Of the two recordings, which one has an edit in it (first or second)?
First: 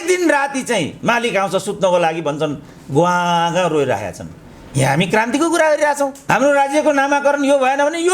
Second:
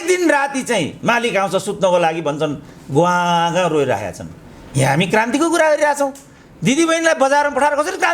first